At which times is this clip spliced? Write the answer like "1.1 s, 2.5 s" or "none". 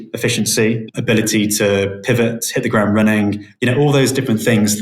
1.0 s

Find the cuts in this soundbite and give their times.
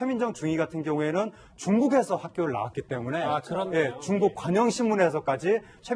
1.9 s

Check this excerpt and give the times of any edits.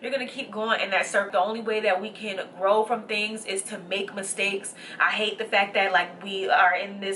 1.3 s

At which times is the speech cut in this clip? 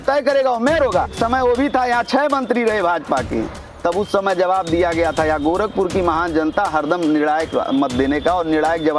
1.1 s

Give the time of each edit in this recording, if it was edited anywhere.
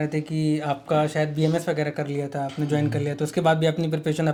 none

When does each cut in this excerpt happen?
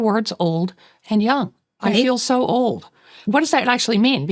1.7 s, 3.1 s

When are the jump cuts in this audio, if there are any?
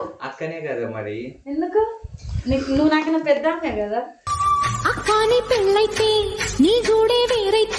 1.7 s, 4.4 s

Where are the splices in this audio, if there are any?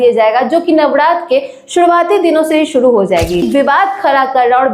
3.4 s

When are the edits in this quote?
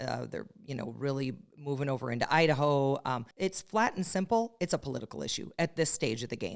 3.3 s

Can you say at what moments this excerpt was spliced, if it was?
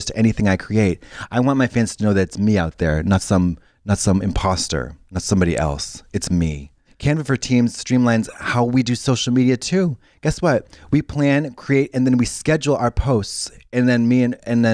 none

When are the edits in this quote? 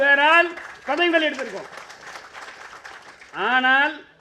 none

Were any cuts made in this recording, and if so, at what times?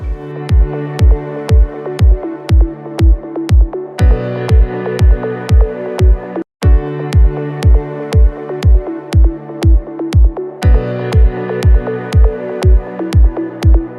6.6 s, 13.0 s

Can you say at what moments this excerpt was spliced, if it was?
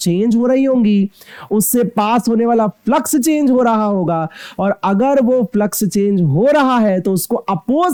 none

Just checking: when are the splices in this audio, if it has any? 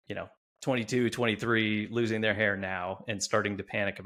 none

